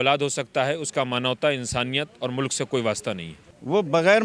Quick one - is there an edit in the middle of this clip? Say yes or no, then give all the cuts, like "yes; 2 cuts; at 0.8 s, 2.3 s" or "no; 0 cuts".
yes; 1 cut; at 3.4 s